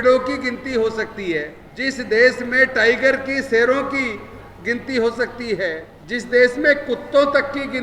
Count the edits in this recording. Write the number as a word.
two